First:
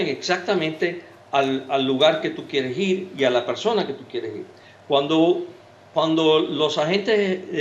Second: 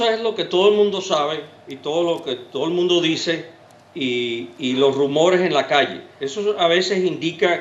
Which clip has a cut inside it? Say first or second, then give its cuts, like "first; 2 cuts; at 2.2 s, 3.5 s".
second; 1 cut; at 2.5 s